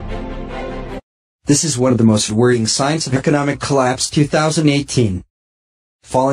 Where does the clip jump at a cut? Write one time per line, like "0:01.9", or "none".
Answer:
none